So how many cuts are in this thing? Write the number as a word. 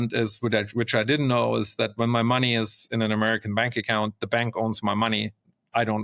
zero